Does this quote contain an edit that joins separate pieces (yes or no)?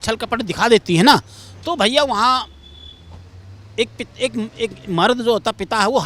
no